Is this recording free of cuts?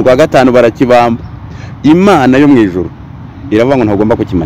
yes; 0 cuts

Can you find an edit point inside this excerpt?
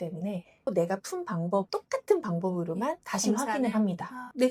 no; 0 cuts

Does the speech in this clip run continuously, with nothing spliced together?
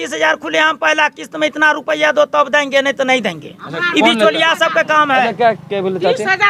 yes; 0 cuts

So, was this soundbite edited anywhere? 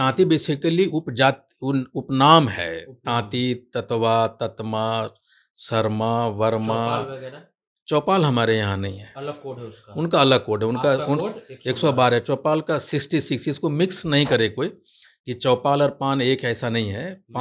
no; 0 cuts

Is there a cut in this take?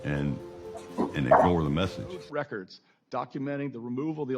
yes; 1 cut; at 2.2 s

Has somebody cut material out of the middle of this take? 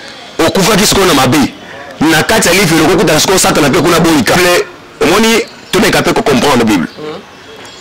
yes; 1 cut; at 4.4 s

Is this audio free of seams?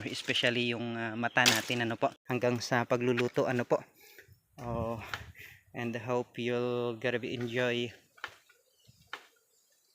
no; 1 cut; at 2.2 s

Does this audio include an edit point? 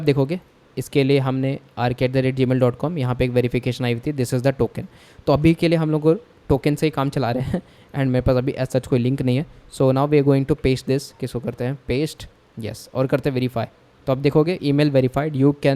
yes; 1 cut; at 11.2 s

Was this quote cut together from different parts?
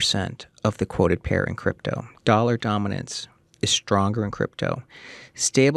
no; 0 cuts

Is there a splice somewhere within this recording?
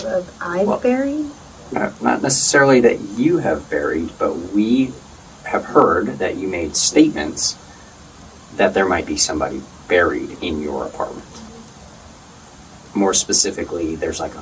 no; 0 cuts

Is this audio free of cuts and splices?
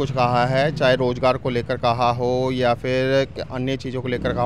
yes; 0 cuts

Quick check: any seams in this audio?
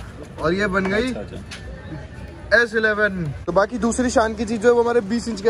yes; 1 cut; at 3.3 s

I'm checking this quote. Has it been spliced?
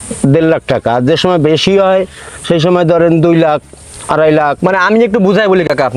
no; 0 cuts

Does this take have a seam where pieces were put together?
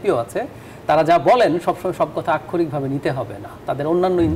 no; 0 cuts

